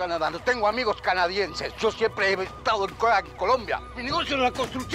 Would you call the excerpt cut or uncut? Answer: cut